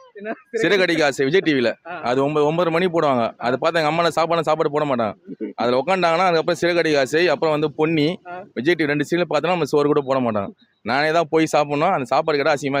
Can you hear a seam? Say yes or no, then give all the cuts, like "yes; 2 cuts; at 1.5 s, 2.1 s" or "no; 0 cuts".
no; 0 cuts